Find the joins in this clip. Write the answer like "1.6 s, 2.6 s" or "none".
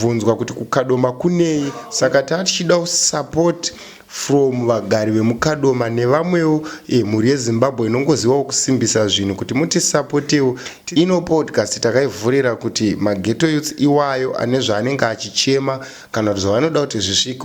1.8 s, 10.7 s